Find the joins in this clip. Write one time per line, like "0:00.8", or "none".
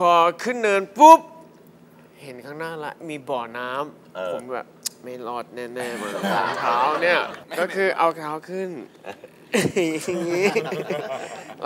0:07.4